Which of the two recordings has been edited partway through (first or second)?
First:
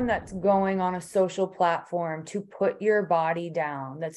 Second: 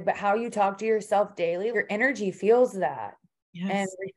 second